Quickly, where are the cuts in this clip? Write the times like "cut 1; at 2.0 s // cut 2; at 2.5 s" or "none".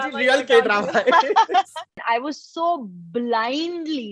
cut 1; at 2.0 s